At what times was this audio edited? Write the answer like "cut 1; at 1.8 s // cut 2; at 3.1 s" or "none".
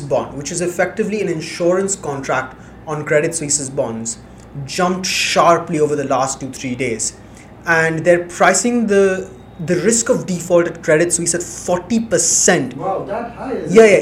none